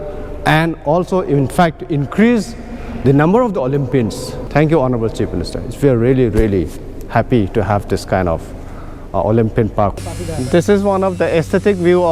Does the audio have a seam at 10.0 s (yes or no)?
yes